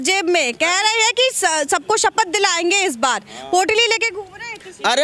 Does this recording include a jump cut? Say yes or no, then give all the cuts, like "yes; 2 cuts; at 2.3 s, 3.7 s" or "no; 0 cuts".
no; 0 cuts